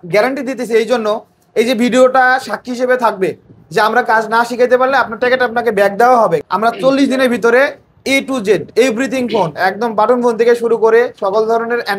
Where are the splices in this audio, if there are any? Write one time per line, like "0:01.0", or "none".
0:06.5